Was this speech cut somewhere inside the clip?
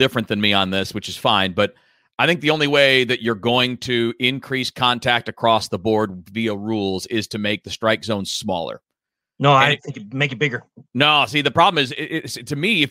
no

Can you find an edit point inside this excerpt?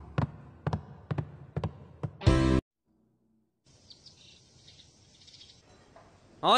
yes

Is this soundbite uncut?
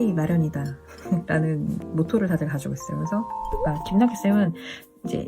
no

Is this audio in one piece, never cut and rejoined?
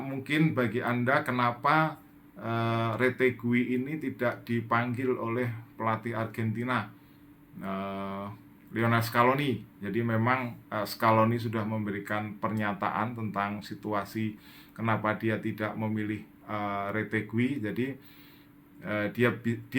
yes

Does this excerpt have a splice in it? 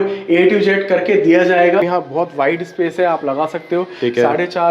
yes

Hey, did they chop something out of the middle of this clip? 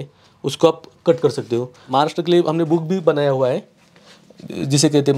yes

